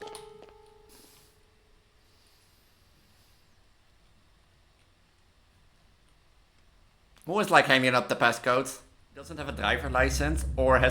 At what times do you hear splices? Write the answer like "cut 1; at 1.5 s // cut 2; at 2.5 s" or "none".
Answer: cut 1; at 9.4 s